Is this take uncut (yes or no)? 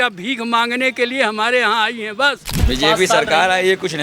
no